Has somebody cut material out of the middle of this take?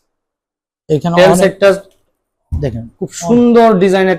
no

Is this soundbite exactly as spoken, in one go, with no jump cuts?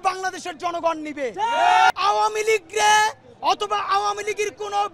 no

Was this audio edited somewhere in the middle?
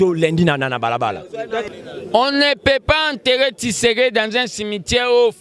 yes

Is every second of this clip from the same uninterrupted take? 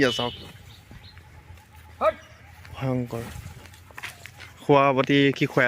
no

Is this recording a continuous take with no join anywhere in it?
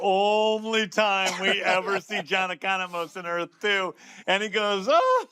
no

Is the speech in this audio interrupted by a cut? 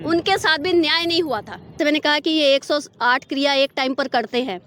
yes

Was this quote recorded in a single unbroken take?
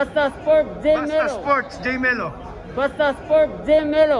yes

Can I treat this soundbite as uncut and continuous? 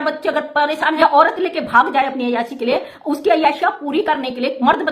no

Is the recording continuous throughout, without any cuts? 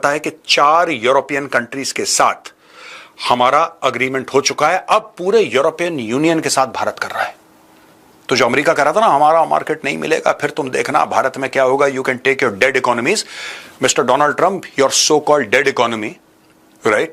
yes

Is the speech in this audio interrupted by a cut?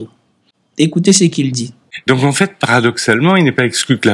yes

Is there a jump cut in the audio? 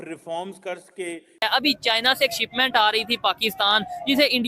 yes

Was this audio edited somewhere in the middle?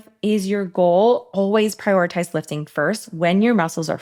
no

